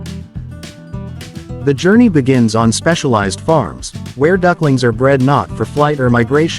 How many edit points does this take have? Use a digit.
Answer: 1